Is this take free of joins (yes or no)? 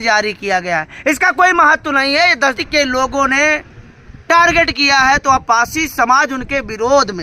no